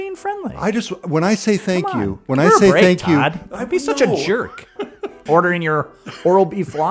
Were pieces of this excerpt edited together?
yes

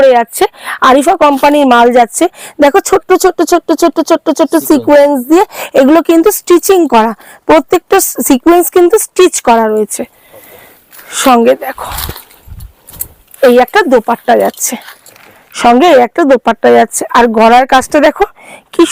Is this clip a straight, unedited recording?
yes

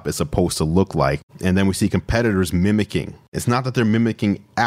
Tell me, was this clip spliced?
yes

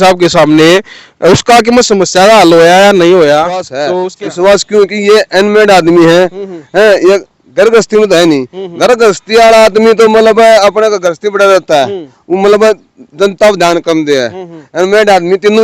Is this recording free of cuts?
no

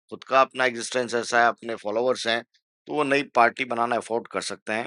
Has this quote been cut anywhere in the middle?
no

